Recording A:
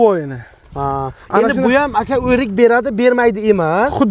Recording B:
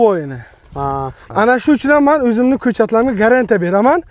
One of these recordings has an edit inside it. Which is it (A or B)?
B